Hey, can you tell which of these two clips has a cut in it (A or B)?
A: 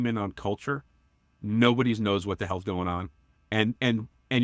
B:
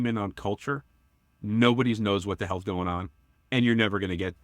B